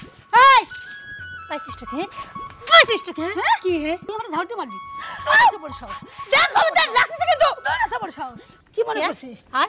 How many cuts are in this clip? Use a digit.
2